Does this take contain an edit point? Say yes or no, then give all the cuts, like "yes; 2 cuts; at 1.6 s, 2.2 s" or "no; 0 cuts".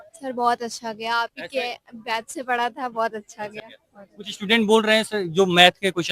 no; 0 cuts